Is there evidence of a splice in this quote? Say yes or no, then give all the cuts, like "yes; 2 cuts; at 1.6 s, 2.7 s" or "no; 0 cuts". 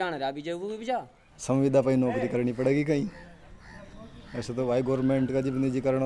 yes; 1 cut; at 1.0 s